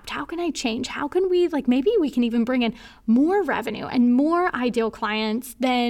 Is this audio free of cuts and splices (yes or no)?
yes